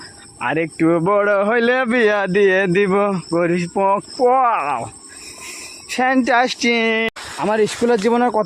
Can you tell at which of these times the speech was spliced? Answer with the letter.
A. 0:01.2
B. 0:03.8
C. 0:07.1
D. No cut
C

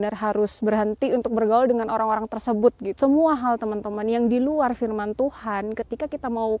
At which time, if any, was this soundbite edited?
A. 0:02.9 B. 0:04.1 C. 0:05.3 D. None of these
A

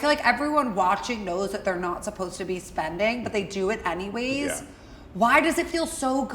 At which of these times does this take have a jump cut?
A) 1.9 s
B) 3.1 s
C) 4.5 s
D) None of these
D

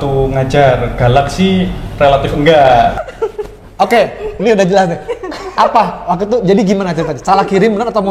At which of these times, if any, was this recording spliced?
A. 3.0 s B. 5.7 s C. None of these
A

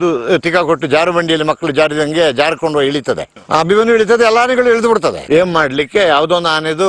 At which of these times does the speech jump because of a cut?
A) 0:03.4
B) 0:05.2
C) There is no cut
B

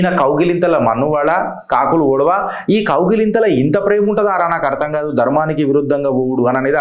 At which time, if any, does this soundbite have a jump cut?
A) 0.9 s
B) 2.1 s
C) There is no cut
C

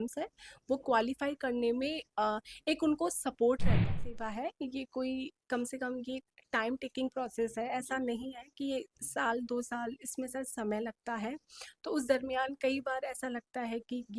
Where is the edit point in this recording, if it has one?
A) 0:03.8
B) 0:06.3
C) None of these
A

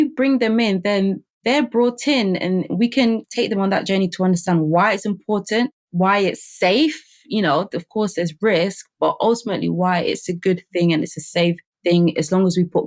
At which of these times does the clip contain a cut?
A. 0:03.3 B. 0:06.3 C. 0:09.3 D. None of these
A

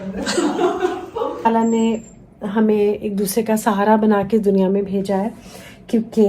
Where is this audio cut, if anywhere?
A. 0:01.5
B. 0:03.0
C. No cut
A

